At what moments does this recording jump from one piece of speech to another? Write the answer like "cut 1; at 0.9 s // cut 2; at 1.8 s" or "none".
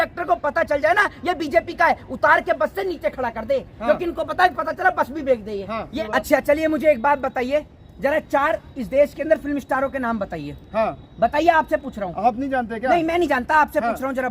cut 1; at 5.9 s